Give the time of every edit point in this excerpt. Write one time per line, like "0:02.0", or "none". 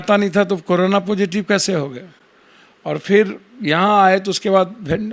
none